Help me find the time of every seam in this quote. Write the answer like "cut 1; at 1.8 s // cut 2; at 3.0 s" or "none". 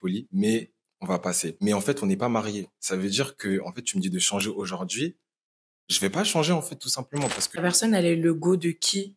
cut 1; at 1.6 s // cut 2; at 7.6 s